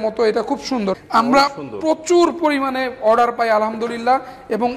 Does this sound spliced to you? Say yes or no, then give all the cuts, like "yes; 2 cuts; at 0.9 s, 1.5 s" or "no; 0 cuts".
yes; 1 cut; at 0.9 s